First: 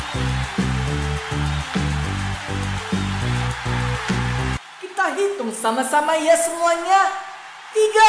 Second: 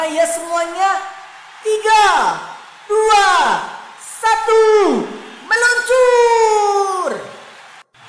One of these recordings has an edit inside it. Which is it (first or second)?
first